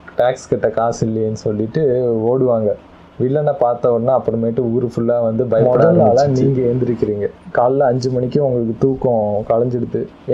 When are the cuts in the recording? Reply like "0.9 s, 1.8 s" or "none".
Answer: 5.6 s